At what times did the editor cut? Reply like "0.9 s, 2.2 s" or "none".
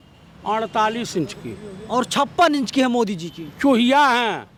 none